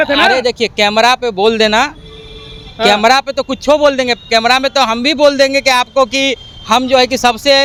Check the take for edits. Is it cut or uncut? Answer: uncut